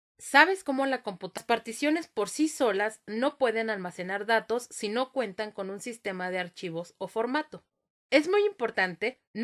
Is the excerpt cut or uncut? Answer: uncut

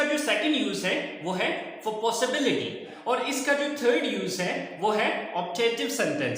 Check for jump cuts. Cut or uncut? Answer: cut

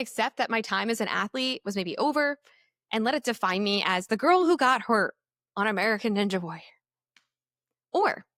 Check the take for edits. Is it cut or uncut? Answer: uncut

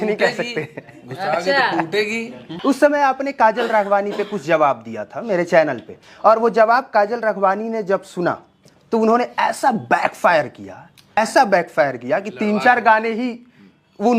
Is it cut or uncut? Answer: cut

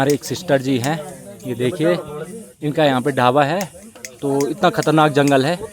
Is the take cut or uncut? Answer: uncut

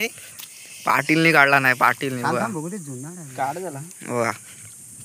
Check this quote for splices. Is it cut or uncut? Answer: uncut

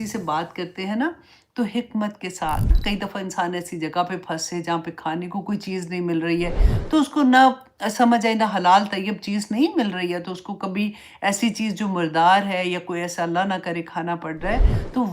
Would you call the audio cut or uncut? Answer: cut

